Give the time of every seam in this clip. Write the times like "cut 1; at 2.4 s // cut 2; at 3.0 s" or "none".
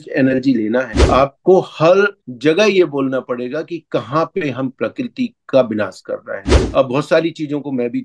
cut 1; at 1.0 s // cut 2; at 6.5 s